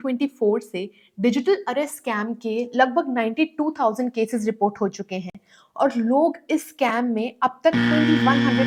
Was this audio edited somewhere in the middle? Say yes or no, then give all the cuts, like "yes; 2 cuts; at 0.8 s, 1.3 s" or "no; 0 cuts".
no; 0 cuts